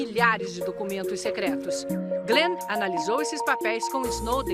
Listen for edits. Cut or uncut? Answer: cut